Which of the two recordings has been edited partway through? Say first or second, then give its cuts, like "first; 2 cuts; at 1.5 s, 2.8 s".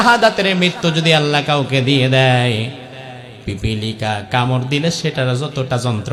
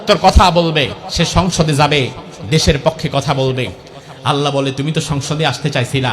second; 1 cut; at 1.0 s